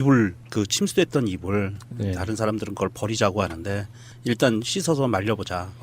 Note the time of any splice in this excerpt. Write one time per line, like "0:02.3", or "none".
0:04.7